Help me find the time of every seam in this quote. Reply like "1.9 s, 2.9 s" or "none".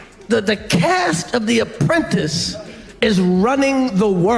none